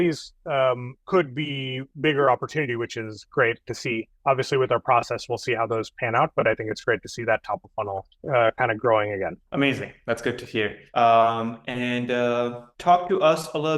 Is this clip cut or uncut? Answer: uncut